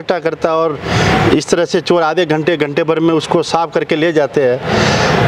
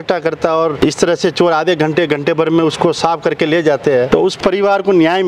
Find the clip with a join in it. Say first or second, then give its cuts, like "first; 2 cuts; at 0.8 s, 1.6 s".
second; 2 cuts; at 0.8 s, 4.3 s